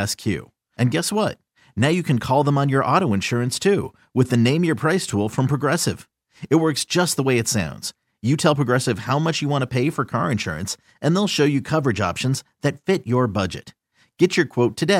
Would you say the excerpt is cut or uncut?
uncut